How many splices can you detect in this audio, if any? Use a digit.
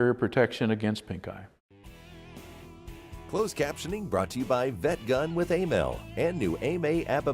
2